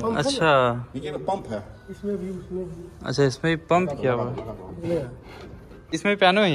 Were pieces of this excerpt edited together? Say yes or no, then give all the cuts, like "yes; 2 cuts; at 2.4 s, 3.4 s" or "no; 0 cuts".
no; 0 cuts